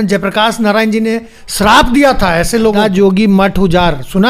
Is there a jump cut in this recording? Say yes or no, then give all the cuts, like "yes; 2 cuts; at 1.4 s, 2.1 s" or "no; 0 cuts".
yes; 1 cut; at 2.8 s